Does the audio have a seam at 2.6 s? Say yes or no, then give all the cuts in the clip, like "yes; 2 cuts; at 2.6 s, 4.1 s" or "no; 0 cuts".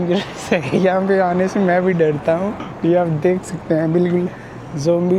yes; 1 cut; at 2.6 s